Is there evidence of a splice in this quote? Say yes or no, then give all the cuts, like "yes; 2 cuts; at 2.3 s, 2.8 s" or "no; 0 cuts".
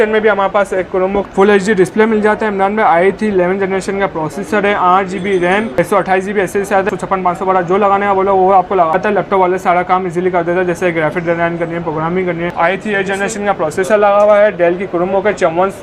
yes; 5 cuts; at 1.2 s, 5.7 s, 6.9 s, 8.9 s, 12.5 s